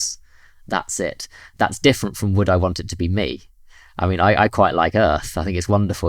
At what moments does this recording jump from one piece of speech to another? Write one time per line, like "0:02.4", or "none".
0:01.4